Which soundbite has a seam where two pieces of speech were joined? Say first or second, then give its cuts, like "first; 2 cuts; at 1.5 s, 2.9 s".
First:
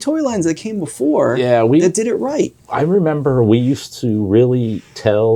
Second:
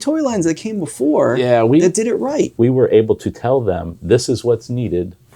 second; 1 cut; at 2.5 s